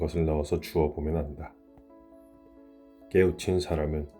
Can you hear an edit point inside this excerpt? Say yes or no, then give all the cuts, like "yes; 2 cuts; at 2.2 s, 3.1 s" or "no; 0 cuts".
yes; 2 cuts; at 1.5 s, 3.1 s